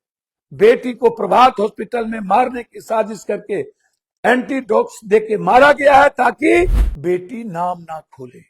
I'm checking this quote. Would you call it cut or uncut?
cut